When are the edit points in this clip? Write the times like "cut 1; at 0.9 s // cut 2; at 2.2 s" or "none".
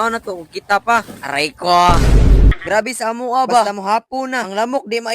cut 1; at 2.5 s